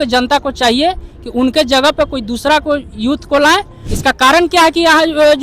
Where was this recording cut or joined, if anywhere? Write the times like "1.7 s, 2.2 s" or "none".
3.8 s